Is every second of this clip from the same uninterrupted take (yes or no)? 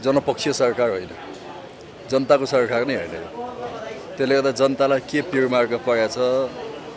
yes